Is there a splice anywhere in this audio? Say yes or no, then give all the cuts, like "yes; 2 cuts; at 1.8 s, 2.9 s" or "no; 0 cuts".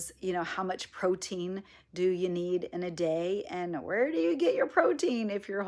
no; 0 cuts